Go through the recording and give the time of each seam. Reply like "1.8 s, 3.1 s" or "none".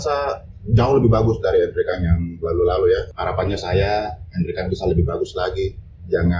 3.1 s